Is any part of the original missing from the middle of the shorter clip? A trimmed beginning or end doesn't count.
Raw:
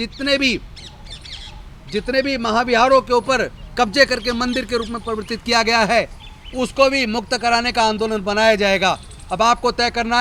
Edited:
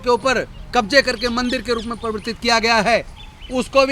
no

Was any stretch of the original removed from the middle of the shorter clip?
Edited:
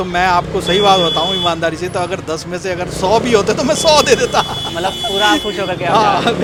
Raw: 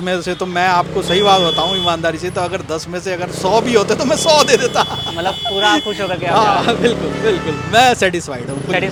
no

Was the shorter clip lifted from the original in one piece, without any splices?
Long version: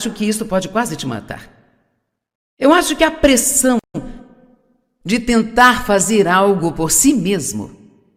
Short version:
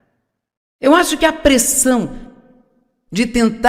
no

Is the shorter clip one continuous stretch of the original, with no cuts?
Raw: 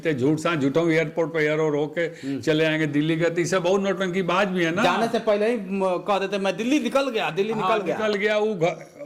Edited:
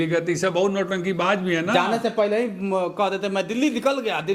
yes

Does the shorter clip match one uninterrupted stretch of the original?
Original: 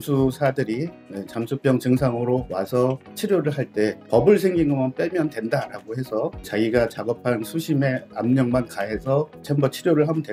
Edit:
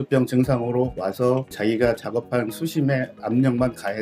no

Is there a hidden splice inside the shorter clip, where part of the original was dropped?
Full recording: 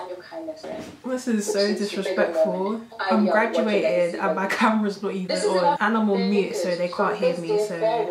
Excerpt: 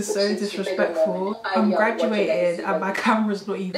yes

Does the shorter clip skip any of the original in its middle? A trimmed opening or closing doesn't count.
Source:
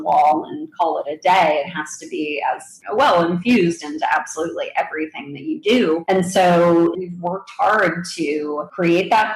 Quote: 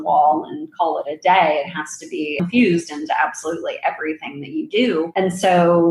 yes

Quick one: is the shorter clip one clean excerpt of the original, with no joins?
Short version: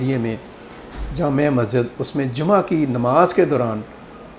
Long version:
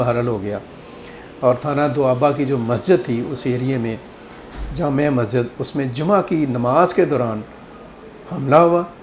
yes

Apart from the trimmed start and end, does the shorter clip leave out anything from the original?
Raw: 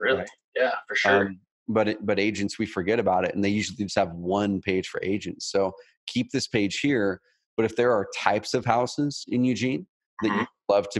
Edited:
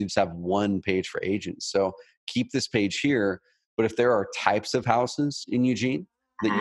no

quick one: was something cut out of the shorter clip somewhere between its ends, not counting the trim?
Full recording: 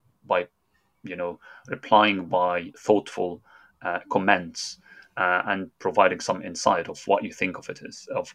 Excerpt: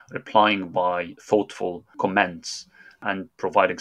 yes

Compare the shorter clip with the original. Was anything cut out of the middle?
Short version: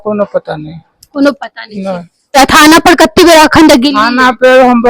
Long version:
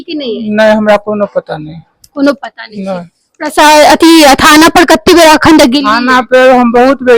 yes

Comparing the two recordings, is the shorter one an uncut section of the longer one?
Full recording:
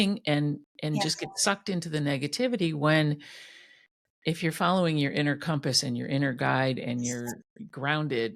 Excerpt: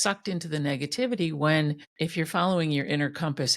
no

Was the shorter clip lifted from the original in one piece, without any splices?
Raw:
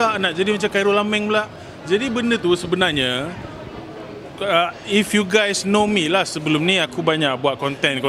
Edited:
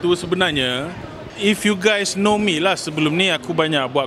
no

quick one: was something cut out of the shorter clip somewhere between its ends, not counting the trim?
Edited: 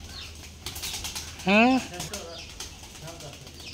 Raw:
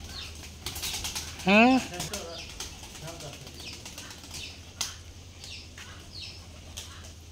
no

